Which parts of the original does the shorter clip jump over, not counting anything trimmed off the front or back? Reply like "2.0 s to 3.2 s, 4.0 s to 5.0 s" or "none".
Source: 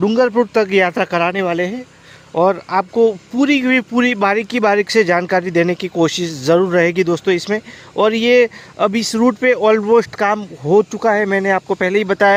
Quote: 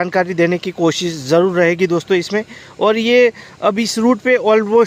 none